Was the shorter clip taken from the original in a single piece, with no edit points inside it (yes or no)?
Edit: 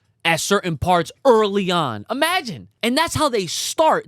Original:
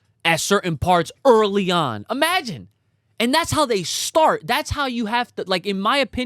no